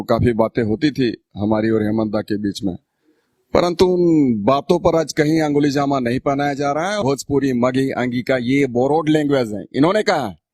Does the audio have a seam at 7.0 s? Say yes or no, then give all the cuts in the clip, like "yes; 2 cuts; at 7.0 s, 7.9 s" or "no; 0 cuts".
yes; 1 cut; at 7.0 s